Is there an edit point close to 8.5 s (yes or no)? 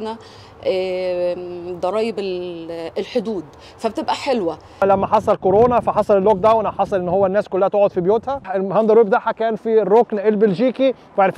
yes